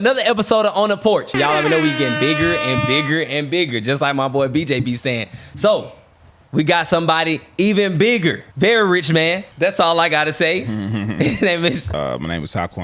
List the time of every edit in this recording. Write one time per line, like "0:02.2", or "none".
0:01.3
0:08.5
0:09.5
0:11.9